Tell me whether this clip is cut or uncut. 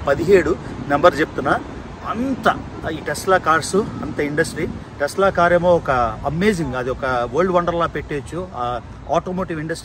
uncut